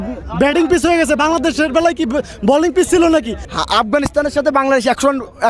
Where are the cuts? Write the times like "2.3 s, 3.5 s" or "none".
3.4 s